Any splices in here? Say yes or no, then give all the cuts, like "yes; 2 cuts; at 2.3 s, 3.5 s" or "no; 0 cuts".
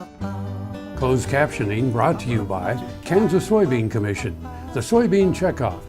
yes; 1 cut; at 1.0 s